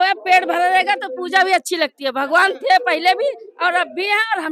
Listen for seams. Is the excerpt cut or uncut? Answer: uncut